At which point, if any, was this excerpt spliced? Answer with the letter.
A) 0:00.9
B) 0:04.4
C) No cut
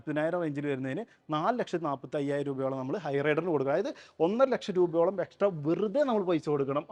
C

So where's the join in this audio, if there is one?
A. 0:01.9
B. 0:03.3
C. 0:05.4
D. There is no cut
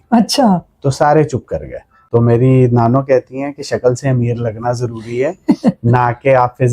A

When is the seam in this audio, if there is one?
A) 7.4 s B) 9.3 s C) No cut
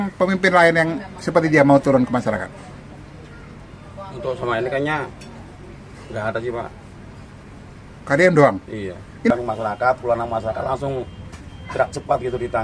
B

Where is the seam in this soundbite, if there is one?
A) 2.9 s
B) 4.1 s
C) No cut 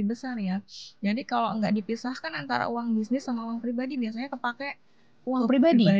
C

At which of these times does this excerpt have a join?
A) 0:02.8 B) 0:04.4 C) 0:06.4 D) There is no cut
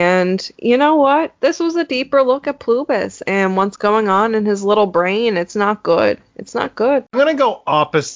D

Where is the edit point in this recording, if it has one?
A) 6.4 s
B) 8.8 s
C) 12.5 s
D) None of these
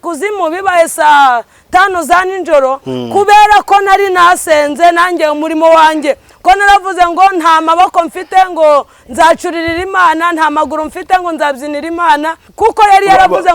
C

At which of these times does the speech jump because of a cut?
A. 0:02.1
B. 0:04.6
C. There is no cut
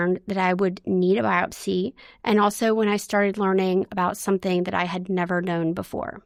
C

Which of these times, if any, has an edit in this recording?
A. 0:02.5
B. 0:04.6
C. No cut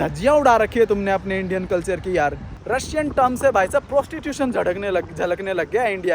A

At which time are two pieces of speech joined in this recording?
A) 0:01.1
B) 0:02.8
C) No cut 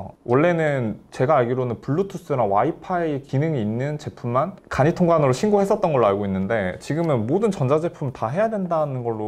C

